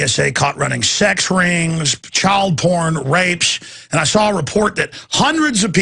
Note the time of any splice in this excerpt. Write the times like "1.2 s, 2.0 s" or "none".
1.2 s